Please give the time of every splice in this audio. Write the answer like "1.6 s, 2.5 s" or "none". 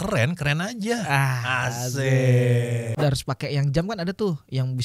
2.9 s